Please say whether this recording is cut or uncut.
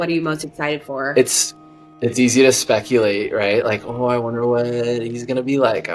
uncut